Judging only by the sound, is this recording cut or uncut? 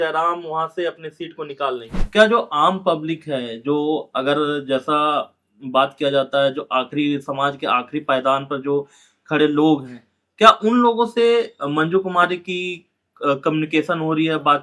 cut